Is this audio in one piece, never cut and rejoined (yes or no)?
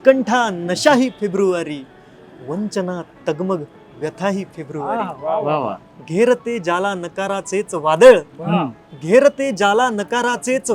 yes